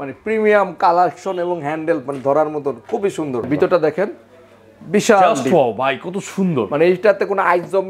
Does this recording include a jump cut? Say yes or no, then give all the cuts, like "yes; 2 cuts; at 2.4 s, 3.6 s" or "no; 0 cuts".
yes; 1 cut; at 3.5 s